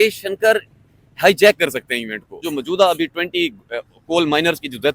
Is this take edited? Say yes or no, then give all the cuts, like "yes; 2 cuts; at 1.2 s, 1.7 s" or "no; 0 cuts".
yes; 1 cut; at 2.4 s